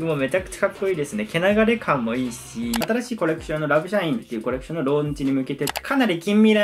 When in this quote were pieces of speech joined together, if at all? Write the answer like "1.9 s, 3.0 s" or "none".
2.8 s, 5.8 s